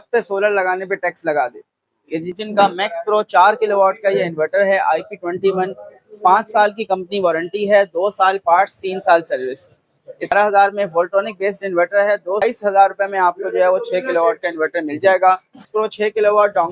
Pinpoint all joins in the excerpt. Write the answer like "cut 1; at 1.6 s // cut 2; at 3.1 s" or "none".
cut 1; at 2.3 s // cut 2; at 10.3 s // cut 3; at 12.4 s // cut 4; at 15.7 s